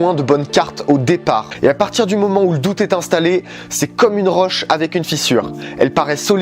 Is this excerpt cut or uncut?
cut